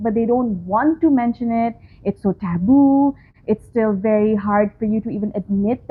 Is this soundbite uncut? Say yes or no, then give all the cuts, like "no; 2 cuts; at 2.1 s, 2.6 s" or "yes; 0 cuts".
yes; 0 cuts